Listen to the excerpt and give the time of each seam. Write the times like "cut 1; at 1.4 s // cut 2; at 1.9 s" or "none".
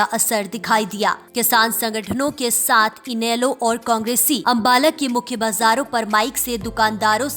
cut 1; at 1.2 s // cut 2; at 4.4 s